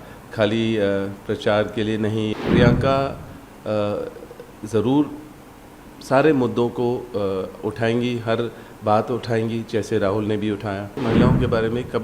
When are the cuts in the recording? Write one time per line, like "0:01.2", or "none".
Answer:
0:02.3
0:11.0